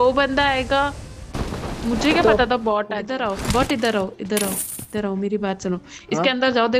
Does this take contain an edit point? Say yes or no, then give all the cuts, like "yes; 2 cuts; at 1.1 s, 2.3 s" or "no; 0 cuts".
yes; 1 cut; at 3.1 s